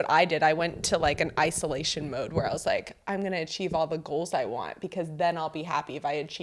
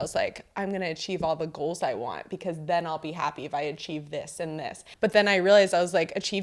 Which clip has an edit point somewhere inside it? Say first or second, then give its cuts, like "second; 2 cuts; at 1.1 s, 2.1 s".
second; 1 cut; at 4.8 s